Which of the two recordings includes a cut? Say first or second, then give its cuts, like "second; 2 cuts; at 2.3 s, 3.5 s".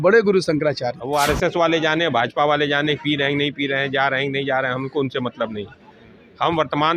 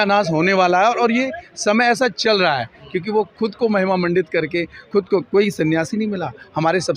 first; 1 cut; at 0.9 s